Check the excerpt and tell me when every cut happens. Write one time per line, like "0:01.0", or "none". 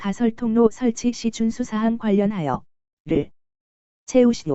none